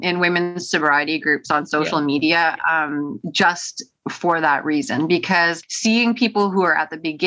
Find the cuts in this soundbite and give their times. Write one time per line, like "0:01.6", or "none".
none